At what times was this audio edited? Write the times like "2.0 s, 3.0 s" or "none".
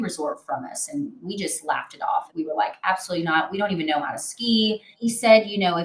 2.3 s, 4.9 s